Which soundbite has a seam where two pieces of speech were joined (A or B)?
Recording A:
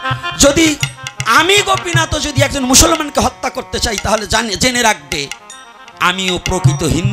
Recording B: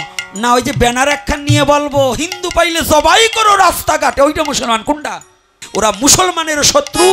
B